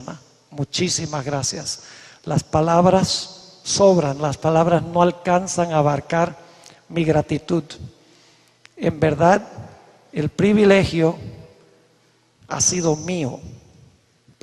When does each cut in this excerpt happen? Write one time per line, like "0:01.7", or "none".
0:11.3